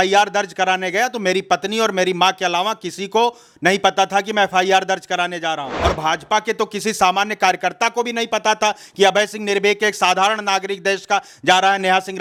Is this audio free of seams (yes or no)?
yes